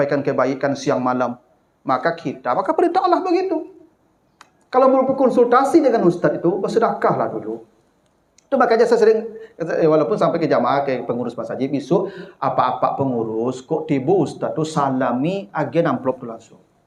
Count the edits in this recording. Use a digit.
0